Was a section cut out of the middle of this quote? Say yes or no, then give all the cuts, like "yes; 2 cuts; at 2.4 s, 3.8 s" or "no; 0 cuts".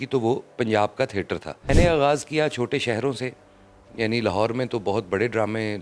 yes; 1 cut; at 1.7 s